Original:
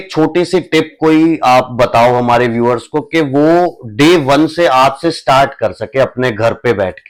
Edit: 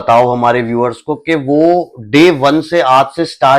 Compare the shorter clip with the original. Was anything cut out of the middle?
no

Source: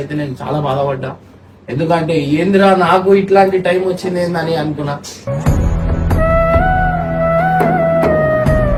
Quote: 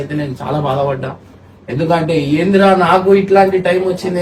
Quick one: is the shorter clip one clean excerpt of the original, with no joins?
yes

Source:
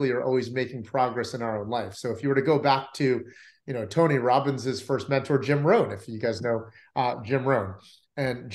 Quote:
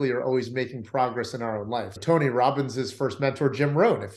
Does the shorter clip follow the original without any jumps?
no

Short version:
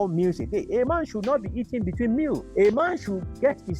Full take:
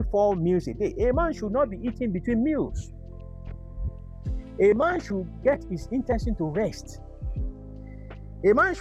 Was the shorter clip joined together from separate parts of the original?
yes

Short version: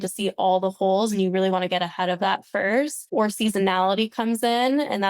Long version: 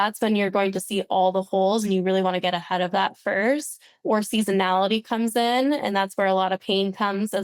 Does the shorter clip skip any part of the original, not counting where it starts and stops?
yes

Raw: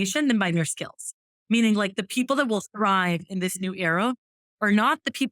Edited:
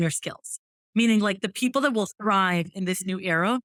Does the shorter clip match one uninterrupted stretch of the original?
yes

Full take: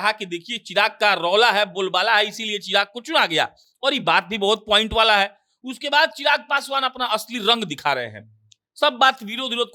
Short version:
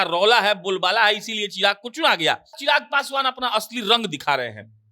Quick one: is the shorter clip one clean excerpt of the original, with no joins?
no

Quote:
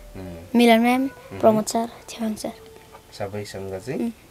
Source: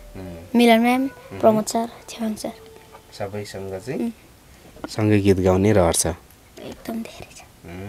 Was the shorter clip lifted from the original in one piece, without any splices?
yes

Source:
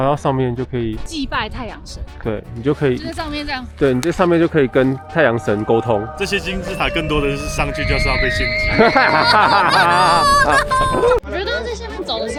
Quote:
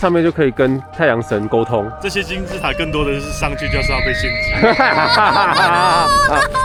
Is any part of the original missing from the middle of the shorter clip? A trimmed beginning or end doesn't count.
no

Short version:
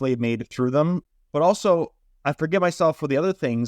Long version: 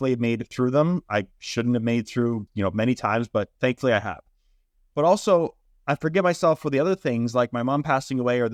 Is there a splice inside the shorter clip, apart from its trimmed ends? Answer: yes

